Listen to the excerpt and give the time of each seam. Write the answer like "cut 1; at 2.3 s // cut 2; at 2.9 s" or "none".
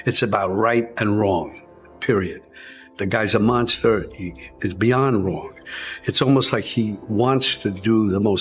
none